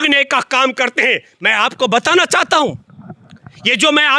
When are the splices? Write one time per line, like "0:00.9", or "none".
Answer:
none